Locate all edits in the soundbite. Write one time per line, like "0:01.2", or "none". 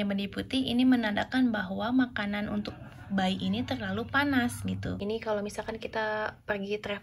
0:05.0